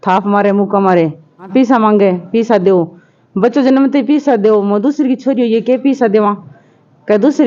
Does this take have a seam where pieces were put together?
yes; 1 cut; at 1.5 s

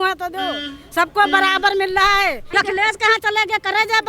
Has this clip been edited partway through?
yes; 1 cut; at 2.4 s

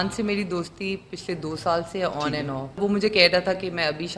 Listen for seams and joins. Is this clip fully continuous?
no; 1 cut; at 2.8 s

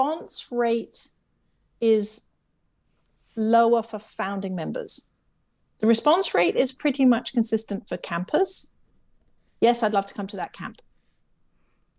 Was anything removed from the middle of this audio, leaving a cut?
no; 0 cuts

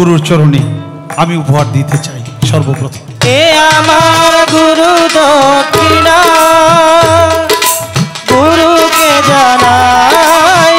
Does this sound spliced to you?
no; 0 cuts

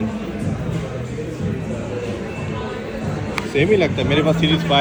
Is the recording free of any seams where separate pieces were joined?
yes; 0 cuts

